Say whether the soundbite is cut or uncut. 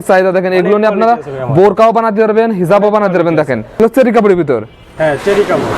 cut